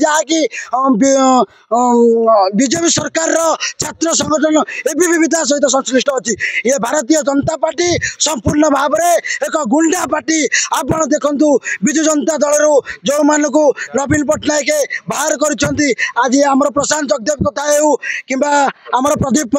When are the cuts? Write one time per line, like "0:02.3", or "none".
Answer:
none